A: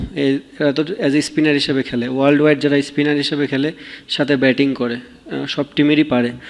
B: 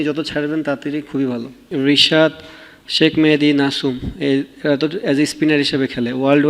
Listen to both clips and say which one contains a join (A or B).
B